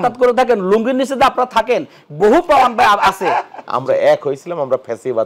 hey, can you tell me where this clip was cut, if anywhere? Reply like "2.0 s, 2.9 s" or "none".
3.6 s